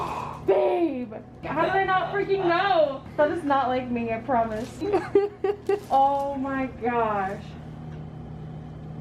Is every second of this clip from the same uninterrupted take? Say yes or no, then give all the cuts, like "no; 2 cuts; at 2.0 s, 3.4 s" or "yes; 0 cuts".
no; 3 cuts; at 1.4 s, 3.0 s, 4.8 s